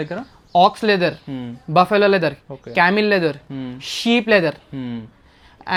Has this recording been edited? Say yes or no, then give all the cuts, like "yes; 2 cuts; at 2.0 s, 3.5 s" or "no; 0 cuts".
no; 0 cuts